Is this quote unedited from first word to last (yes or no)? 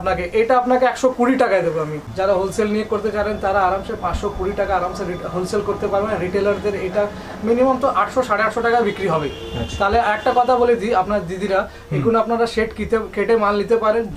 no